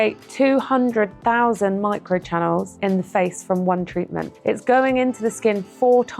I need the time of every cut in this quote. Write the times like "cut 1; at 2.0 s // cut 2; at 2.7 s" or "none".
cut 1; at 2.7 s // cut 2; at 4.3 s